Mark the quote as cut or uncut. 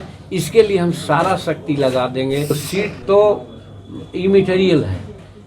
cut